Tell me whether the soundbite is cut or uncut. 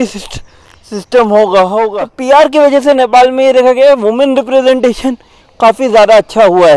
cut